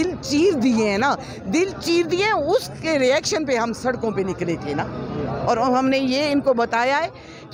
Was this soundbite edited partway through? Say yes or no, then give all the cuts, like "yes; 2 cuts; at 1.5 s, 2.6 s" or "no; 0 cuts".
no; 0 cuts